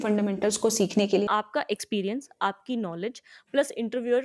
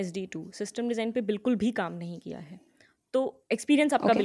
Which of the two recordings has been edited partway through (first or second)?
first